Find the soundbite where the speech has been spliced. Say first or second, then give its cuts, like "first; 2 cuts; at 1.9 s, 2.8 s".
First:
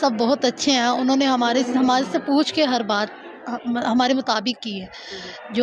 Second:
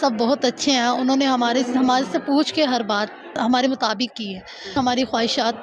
second; 2 cuts; at 3.3 s, 4.8 s